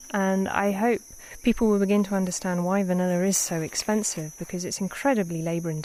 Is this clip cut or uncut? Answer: uncut